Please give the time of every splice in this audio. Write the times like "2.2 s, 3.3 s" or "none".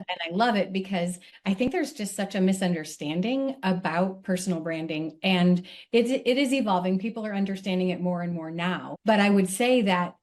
1.7 s, 8.9 s